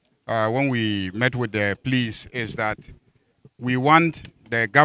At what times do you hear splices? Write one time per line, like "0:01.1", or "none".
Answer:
none